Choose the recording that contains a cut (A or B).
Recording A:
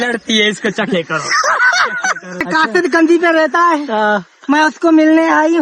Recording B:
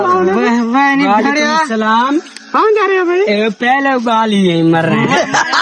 A